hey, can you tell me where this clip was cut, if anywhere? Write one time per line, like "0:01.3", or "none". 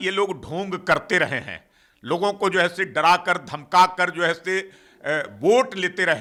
none

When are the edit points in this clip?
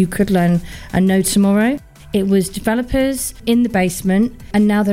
0:01.9

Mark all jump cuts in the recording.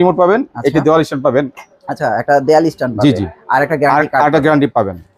none

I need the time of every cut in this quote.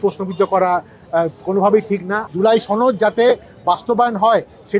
0:02.3

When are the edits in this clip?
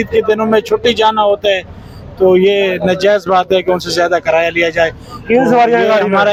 none

